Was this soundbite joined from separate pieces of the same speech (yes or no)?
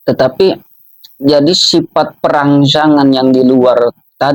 no